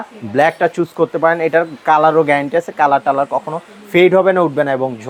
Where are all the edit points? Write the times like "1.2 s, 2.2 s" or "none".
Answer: none